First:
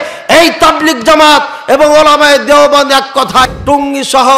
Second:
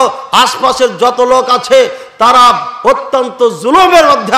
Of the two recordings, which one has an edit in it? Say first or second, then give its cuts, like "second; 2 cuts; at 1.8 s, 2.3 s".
first; 1 cut; at 3.4 s